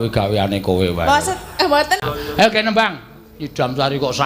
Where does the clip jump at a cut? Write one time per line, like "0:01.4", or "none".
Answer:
0:02.0